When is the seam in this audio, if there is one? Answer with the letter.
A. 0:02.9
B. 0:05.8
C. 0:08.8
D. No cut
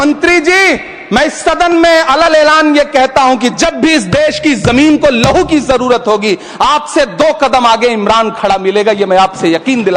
D